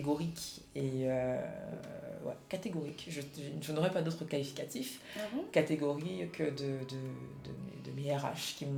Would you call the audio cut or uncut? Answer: uncut